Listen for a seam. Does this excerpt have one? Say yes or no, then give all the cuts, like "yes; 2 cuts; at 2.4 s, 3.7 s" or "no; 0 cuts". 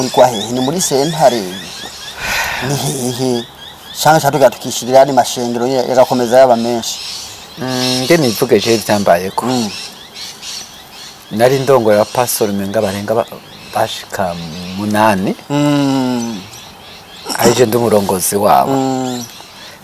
no; 0 cuts